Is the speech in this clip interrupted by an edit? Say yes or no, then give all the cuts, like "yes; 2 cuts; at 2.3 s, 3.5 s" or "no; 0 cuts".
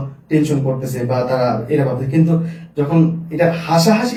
no; 0 cuts